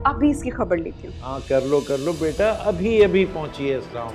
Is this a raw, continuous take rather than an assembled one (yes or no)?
yes